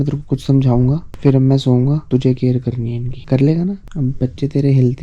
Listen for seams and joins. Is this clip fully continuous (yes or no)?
yes